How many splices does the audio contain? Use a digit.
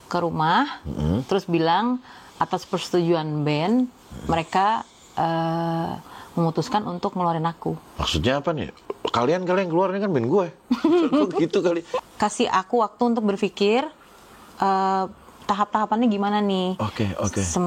2